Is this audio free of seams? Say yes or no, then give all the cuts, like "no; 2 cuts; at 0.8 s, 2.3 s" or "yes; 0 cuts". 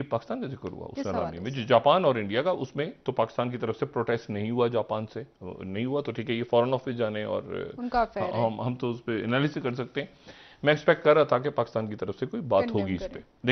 yes; 0 cuts